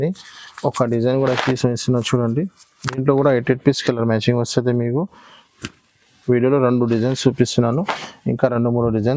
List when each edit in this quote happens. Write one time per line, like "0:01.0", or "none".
none